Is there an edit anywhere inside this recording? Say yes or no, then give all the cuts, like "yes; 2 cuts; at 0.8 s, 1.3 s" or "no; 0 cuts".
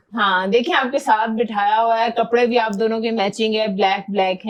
no; 0 cuts